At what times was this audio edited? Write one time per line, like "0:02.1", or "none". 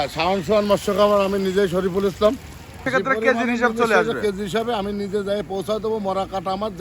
0:02.8